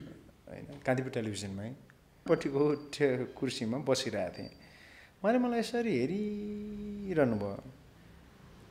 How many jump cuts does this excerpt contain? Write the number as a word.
one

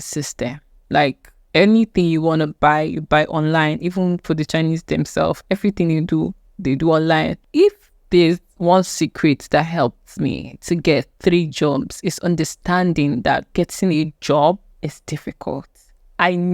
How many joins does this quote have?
one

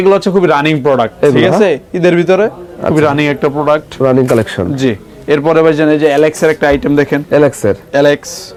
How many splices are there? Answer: zero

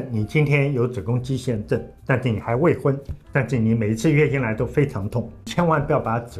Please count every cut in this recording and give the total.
three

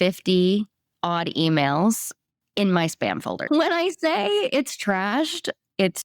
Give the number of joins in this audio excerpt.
one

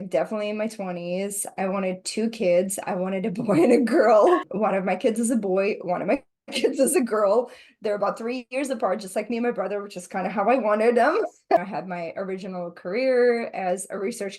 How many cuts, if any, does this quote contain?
two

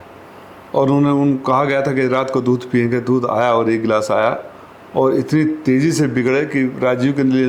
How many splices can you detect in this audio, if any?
zero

